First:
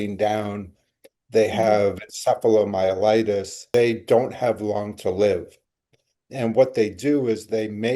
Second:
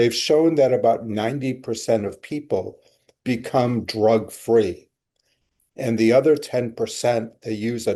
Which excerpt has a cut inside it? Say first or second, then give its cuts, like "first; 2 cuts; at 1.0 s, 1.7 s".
first; 1 cut; at 3.7 s